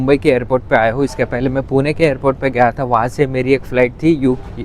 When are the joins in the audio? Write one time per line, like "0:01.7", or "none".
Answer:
none

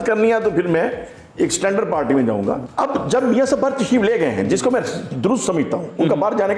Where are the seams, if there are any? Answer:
0:02.6

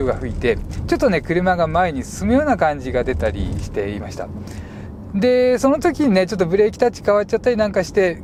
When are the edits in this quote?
none

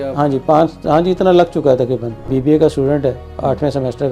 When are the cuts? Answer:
0:02.2

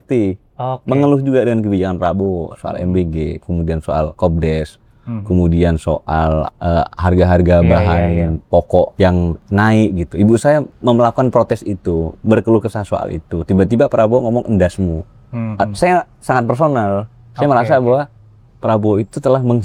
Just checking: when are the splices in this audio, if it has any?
none

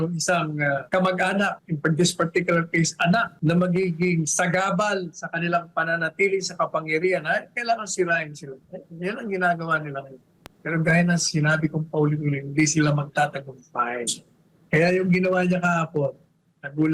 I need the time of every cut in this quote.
0:00.8
0:01.7
0:03.3

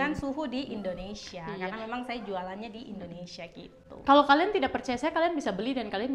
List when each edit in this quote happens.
none

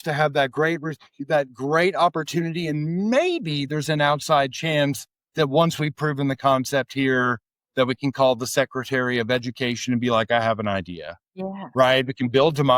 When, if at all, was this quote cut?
none

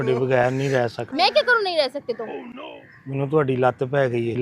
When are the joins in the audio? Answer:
0:01.0

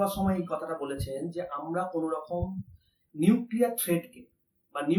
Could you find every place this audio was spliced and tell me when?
none

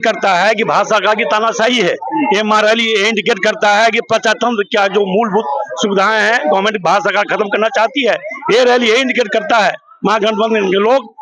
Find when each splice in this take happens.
none

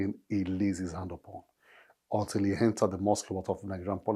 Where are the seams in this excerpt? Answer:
none

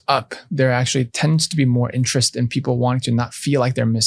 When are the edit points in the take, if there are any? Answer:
none

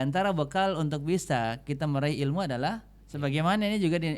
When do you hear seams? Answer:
0:02.9

